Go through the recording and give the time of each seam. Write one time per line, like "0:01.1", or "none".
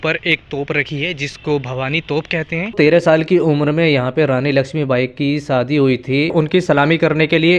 0:02.7
0:06.3